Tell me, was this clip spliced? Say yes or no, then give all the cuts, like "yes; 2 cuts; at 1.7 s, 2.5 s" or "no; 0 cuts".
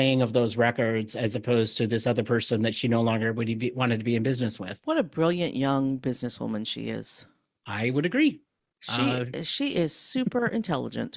yes; 1 cut; at 4.7 s